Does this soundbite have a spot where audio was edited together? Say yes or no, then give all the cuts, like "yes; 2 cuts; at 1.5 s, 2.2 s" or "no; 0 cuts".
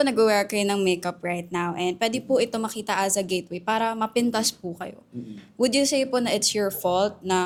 no; 0 cuts